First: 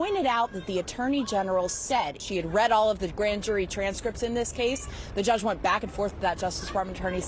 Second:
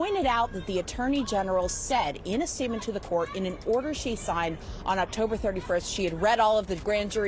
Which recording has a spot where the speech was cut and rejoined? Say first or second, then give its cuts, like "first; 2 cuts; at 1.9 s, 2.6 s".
first; 1 cut; at 2.2 s